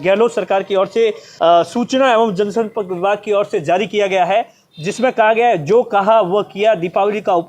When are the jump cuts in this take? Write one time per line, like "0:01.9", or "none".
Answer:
0:01.2